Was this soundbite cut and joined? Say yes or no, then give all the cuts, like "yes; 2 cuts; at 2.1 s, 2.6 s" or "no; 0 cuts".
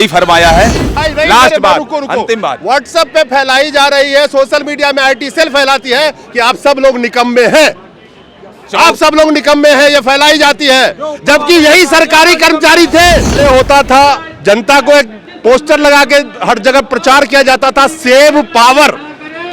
yes; 2 cuts; at 1.0 s, 13.4 s